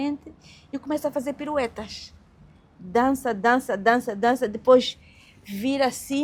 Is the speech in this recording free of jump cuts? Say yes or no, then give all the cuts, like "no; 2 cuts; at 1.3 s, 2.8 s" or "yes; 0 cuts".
yes; 0 cuts